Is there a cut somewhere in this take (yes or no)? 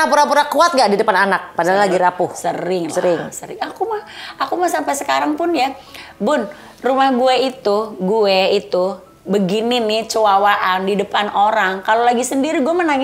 no